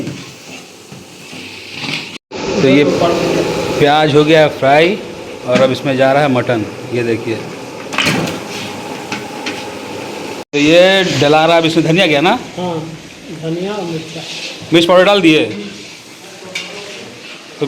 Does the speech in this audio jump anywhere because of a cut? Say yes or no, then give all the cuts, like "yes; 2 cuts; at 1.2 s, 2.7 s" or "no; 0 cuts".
yes; 2 cuts; at 2.2 s, 10.4 s